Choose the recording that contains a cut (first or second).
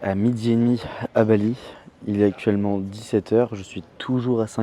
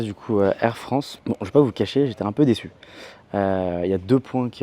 second